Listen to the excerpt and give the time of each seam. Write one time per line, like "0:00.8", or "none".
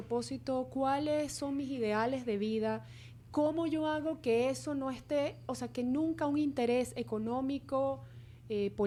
none